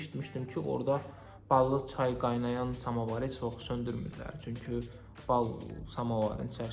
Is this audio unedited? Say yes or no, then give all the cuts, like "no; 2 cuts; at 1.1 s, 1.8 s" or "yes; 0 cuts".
yes; 0 cuts